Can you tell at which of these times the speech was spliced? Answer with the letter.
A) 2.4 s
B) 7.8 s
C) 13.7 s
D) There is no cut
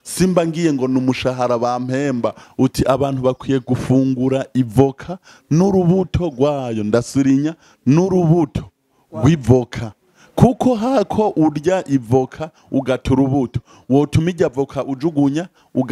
A